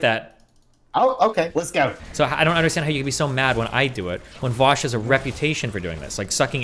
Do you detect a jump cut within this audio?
yes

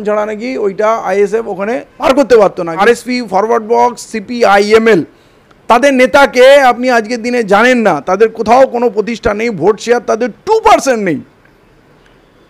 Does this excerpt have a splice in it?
yes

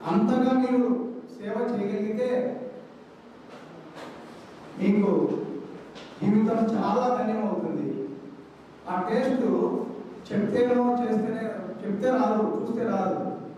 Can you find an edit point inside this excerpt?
no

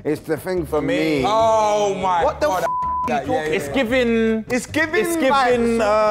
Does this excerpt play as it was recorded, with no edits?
yes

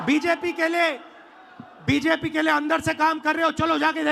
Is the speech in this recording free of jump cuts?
yes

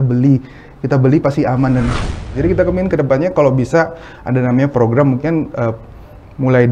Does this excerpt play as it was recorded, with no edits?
no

